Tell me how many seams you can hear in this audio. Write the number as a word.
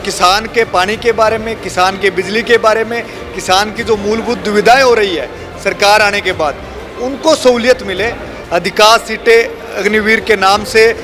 one